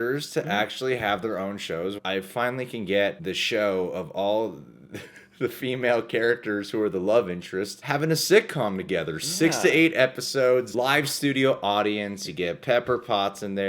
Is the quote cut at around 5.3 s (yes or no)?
no